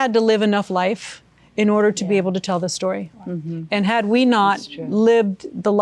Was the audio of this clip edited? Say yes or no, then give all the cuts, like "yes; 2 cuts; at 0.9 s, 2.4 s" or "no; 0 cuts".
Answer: no; 0 cuts